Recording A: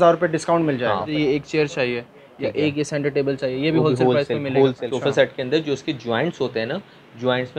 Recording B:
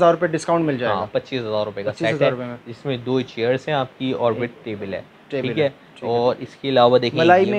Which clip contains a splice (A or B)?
A